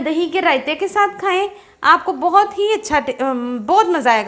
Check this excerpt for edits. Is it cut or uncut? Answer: uncut